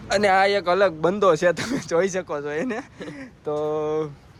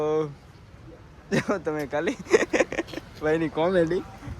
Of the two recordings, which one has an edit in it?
second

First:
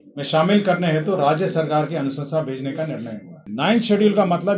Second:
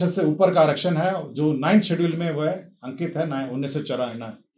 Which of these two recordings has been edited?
first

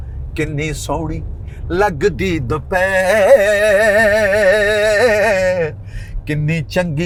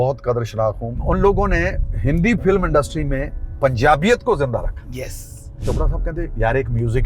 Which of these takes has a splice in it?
second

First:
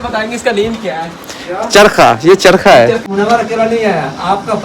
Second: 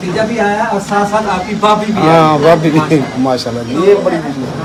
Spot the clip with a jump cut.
first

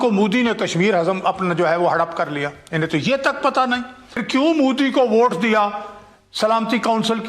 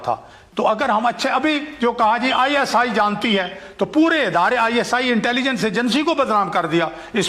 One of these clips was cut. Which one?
first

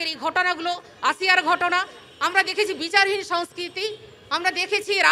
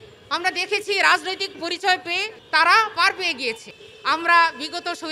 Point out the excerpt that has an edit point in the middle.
second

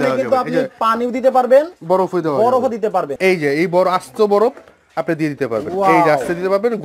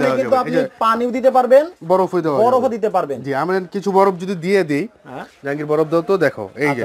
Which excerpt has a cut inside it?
first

